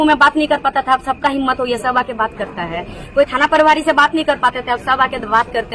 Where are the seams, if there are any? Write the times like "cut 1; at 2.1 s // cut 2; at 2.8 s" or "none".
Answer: none